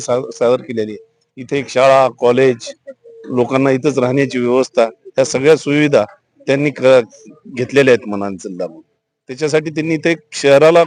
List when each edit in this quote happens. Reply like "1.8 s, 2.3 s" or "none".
none